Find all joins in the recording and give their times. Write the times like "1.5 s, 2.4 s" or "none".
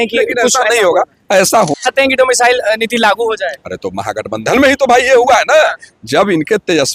1.8 s